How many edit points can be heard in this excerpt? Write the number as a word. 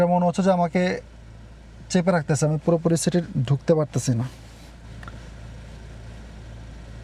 zero